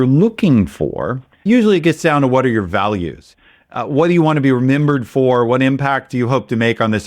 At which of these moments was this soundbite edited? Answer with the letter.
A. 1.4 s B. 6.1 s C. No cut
A